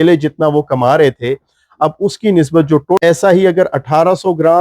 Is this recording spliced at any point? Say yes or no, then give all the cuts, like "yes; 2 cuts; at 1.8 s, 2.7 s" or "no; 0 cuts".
yes; 1 cut; at 3.0 s